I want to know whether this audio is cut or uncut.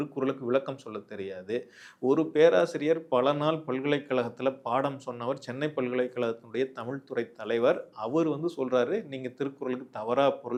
uncut